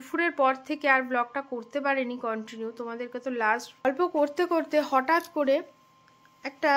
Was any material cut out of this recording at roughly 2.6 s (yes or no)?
no